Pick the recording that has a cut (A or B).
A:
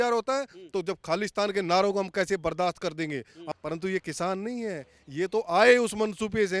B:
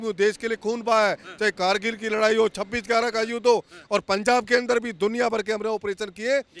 A